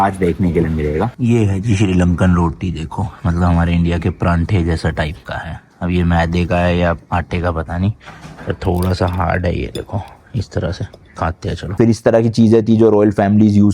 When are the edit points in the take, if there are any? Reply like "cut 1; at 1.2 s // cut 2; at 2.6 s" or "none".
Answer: cut 1; at 1.1 s // cut 2; at 11.7 s